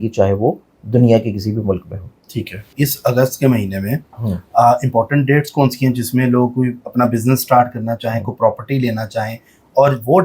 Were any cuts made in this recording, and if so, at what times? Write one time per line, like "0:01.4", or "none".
0:02.7